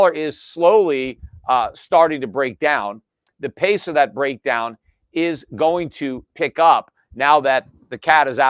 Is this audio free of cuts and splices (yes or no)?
yes